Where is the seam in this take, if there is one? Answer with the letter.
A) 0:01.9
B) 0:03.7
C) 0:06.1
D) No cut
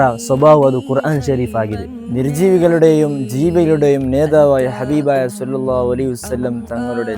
A